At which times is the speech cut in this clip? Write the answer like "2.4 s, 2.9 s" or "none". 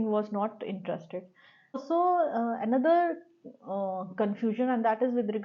1.8 s